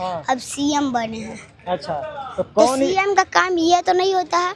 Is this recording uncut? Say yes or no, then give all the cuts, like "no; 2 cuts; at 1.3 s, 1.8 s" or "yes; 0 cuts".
yes; 0 cuts